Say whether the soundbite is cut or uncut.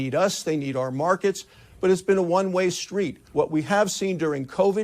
cut